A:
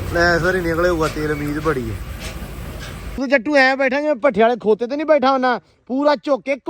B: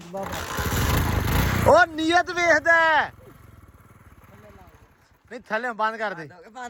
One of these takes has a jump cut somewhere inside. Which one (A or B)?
A